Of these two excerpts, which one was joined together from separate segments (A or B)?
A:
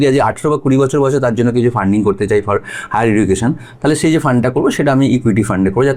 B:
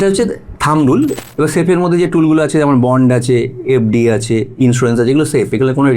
B